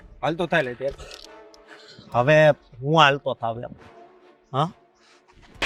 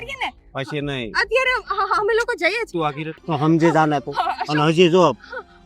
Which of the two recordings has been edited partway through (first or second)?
second